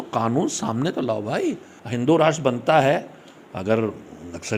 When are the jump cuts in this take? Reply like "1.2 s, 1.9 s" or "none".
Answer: 1.7 s